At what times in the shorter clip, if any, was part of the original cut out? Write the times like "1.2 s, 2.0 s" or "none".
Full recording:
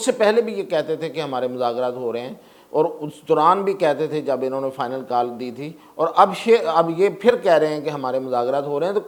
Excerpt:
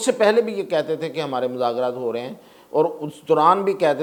none